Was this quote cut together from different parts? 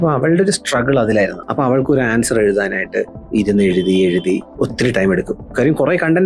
yes; 3 cuts; at 1.4 s, 3.2 s, 4.5 s

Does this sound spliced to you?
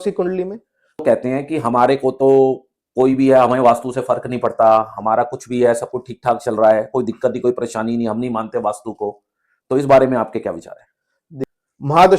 yes; 2 cuts; at 1.0 s, 11.4 s

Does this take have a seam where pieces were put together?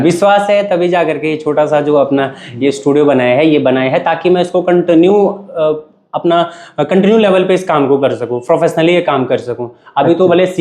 no; 0 cuts

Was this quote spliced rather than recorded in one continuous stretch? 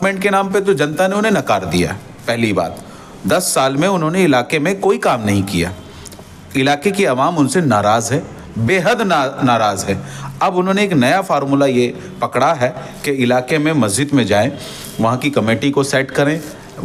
no; 0 cuts

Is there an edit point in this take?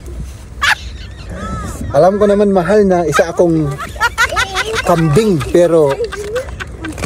no; 0 cuts

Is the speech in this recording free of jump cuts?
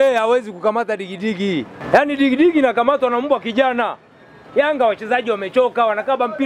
yes; 0 cuts

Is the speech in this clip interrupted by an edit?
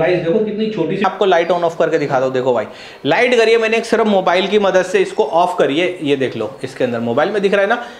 yes; 1 cut; at 1.0 s

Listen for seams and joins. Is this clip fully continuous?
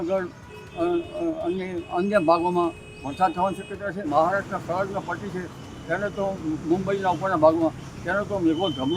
no; 1 cut; at 4.1 s

